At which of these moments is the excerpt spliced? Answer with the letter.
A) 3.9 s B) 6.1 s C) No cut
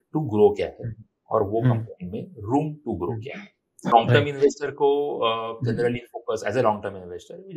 A